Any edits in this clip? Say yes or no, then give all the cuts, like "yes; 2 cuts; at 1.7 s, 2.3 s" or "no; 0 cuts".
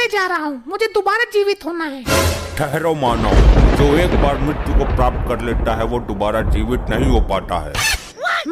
no; 0 cuts